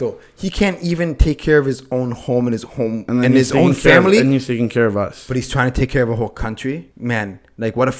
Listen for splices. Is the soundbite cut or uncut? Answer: cut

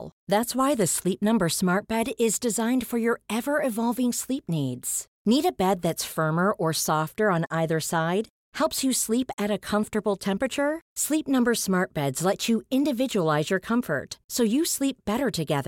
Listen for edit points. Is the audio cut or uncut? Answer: uncut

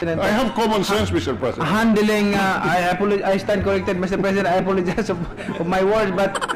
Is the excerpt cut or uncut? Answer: uncut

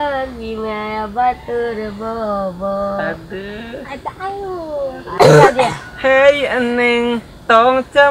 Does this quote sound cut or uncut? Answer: cut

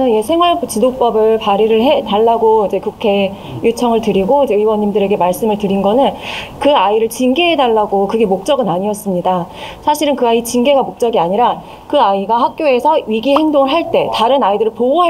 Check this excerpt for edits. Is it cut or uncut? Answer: uncut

